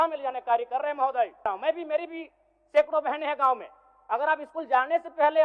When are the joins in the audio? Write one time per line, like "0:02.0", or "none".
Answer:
0:01.5